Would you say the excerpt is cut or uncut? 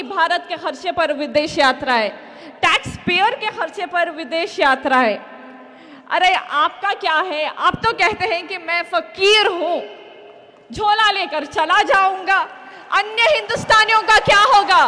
uncut